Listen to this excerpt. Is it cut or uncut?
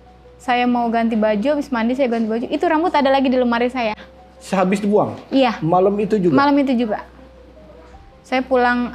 uncut